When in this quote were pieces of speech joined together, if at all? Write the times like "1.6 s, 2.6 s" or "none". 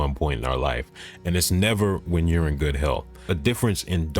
3.1 s